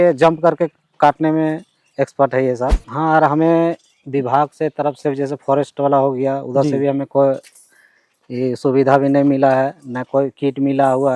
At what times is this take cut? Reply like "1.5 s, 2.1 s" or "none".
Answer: 2.7 s